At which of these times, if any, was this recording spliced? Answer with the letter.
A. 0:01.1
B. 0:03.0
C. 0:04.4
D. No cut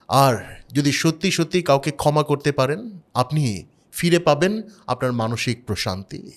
B